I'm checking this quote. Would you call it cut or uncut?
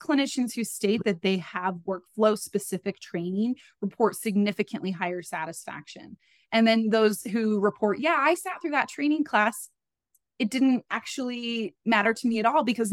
uncut